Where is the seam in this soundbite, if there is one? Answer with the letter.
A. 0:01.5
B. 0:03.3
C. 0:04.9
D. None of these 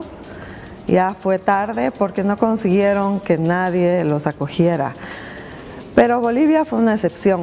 B